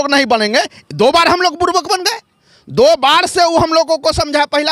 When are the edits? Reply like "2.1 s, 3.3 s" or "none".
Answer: none